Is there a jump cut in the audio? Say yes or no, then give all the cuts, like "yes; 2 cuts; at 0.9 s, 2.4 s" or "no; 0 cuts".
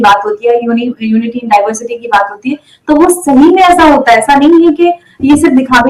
no; 0 cuts